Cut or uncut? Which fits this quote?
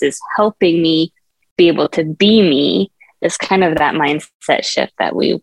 uncut